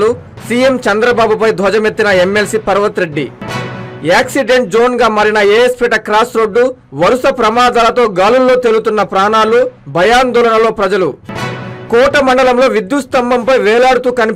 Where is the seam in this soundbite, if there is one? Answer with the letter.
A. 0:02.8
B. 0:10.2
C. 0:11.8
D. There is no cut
D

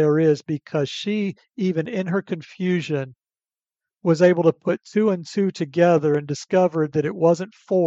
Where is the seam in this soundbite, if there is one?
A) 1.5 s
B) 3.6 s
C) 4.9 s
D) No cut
D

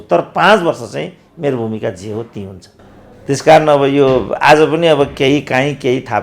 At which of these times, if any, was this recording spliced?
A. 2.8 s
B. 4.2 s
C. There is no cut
C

